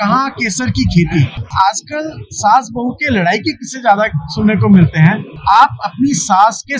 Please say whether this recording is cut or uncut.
cut